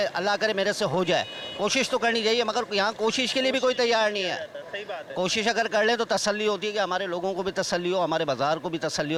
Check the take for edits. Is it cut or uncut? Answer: uncut